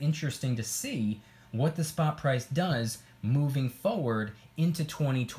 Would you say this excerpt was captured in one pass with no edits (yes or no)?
yes